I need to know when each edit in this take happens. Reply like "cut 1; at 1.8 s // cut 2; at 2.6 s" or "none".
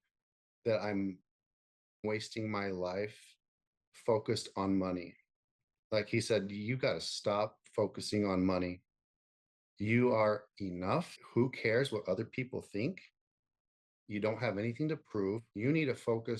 cut 1; at 2.0 s // cut 2; at 11.2 s // cut 3; at 15.5 s